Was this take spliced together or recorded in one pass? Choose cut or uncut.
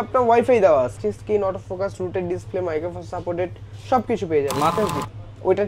cut